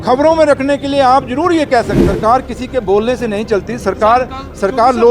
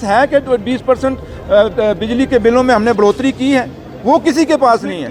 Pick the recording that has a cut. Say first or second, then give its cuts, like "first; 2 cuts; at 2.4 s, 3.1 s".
first; 1 cut; at 2.0 s